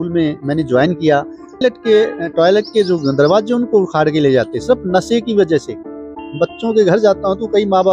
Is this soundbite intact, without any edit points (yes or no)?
no